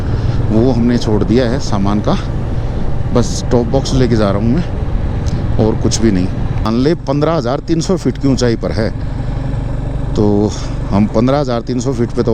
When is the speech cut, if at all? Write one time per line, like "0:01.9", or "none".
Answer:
0:06.6